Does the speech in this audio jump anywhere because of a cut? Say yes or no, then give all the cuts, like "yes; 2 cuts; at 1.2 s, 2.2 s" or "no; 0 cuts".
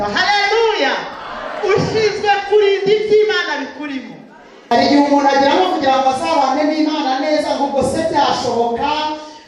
yes; 1 cut; at 4.5 s